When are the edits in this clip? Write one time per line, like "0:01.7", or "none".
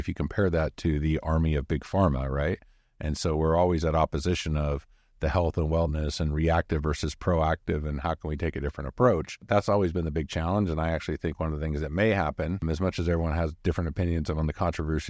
0:09.5
0:12.6